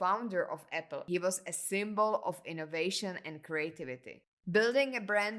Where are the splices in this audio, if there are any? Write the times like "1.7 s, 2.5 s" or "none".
1.0 s, 4.3 s

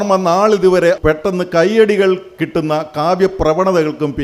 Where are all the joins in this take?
1.0 s

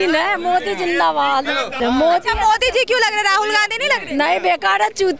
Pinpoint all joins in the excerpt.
1.8 s

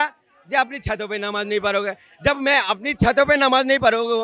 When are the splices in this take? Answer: none

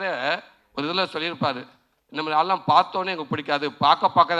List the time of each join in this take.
none

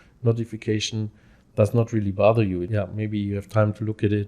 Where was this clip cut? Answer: 2.7 s

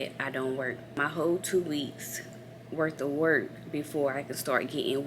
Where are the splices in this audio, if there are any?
1.0 s

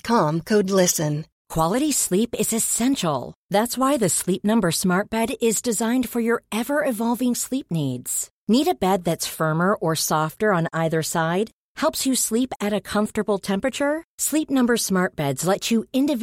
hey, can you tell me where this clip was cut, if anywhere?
1.4 s

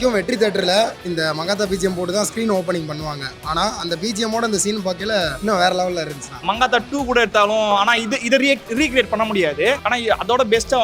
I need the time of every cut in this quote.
1.0 s, 5.4 s, 6.3 s, 9.8 s

